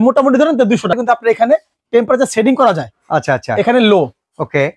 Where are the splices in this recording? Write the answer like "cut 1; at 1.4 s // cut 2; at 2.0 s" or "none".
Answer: cut 1; at 1.0 s